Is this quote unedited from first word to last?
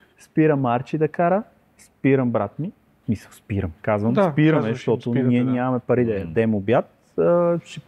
no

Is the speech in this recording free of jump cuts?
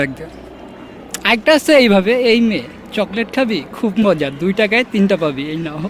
yes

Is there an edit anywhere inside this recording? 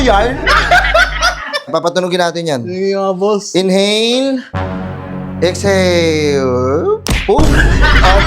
yes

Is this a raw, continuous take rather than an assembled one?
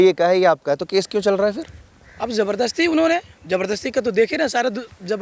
yes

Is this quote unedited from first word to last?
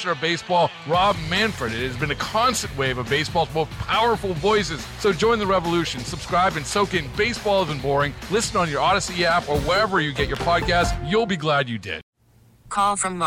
no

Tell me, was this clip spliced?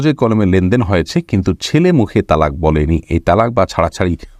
no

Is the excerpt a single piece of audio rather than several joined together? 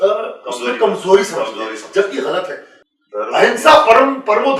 no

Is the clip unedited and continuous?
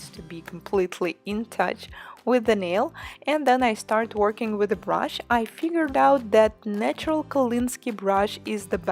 no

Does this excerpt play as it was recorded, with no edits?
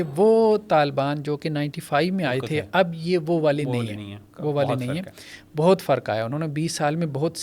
yes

